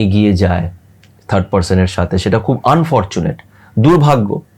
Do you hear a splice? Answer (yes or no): no